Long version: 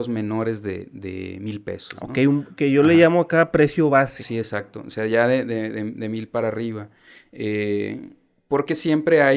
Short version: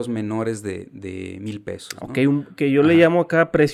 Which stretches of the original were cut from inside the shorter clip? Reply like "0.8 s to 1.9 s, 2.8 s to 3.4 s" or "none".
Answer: none